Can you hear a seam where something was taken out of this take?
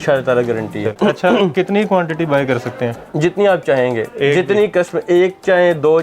yes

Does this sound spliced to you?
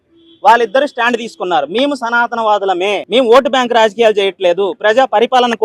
yes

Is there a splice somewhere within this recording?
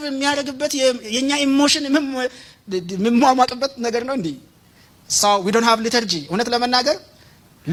no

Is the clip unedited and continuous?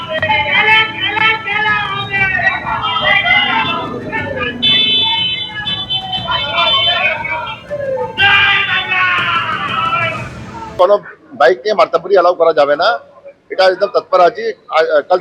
no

